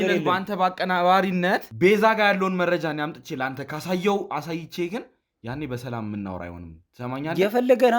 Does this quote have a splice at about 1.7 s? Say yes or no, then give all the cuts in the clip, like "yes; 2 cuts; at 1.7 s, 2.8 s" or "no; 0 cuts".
yes; 1 cut; at 1.7 s